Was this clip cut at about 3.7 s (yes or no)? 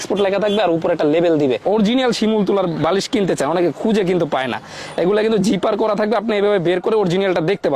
no